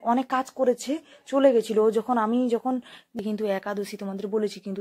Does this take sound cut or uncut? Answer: cut